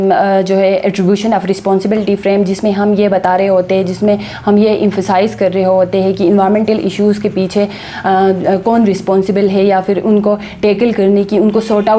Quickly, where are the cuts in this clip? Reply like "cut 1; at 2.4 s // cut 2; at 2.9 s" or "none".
none